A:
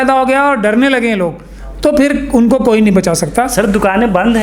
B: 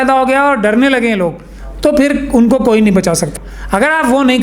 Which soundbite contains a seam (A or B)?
B